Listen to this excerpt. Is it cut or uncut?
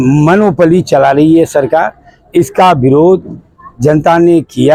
uncut